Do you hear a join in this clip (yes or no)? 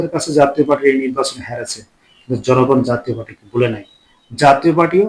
no